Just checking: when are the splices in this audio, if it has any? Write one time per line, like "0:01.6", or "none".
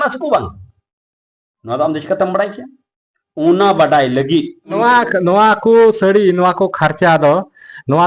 0:04.7